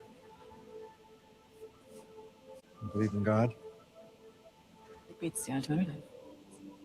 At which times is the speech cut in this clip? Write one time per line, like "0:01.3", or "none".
0:02.7